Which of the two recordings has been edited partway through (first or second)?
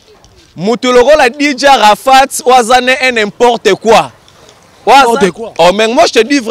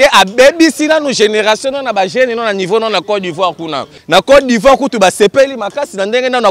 second